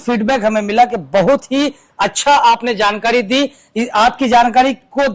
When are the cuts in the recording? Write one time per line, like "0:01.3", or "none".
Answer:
none